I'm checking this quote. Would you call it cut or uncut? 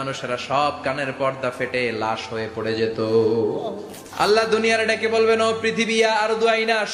uncut